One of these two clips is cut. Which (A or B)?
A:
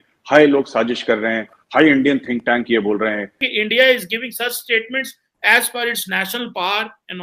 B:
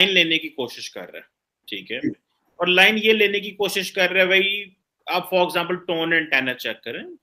A